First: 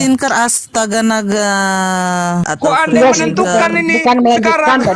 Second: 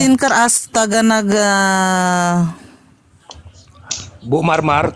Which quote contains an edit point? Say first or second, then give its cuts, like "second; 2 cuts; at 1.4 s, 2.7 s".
first; 1 cut; at 2.5 s